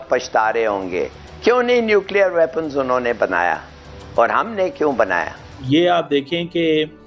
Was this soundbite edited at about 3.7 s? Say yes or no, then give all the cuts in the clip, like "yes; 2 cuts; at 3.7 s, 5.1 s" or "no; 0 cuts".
no; 1 cut; at 5.7 s